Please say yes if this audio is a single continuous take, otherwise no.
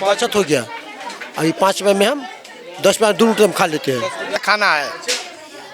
no